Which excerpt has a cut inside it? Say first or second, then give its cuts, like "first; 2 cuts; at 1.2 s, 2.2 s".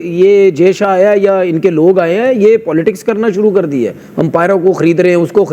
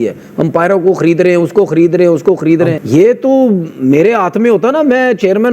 second; 1 cut; at 2.8 s